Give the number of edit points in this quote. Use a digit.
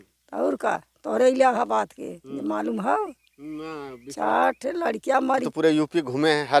1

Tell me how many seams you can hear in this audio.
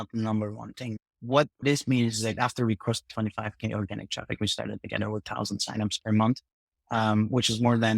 2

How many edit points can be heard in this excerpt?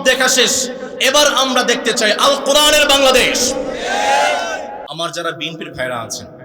1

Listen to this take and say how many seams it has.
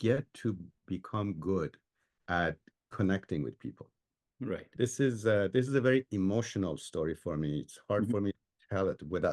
1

